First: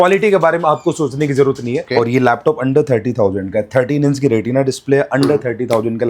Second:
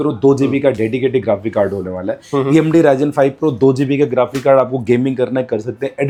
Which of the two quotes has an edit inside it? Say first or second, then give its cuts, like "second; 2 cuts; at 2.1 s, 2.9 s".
first; 1 cut; at 1.9 s